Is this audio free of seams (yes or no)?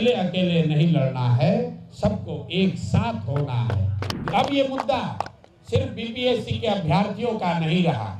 no